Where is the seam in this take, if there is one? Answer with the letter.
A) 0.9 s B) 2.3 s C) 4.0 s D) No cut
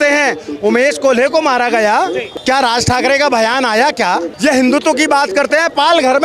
B